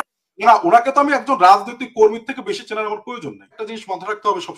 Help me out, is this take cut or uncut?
cut